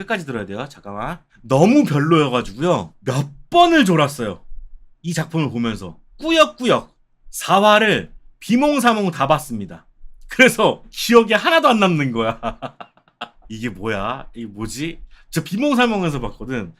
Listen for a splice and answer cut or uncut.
uncut